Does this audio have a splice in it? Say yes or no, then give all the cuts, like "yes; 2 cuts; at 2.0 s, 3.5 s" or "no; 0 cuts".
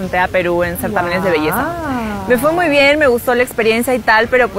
no; 0 cuts